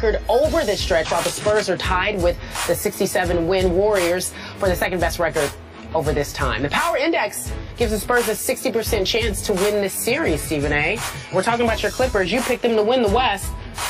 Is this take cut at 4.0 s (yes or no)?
yes